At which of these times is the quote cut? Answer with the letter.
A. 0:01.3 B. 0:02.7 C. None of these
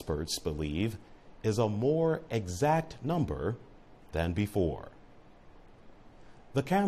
B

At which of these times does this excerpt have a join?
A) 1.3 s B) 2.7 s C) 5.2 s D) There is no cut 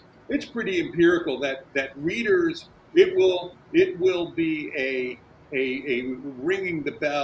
D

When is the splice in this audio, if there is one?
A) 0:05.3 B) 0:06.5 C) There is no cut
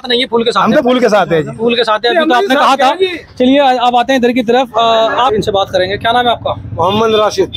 A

